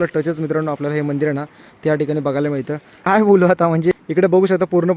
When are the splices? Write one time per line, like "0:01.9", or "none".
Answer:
0:02.9
0:03.9